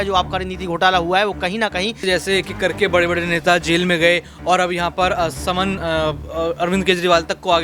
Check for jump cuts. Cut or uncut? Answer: cut